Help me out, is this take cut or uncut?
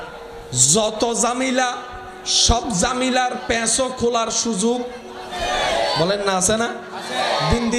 uncut